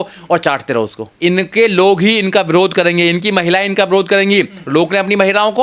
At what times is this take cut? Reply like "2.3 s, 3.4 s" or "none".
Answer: 1.1 s